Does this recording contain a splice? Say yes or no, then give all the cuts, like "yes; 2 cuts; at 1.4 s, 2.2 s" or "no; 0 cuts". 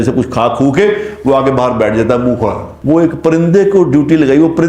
yes; 1 cut; at 2.7 s